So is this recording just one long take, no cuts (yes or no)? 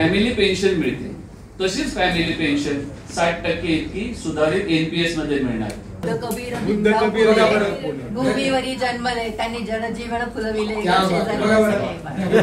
no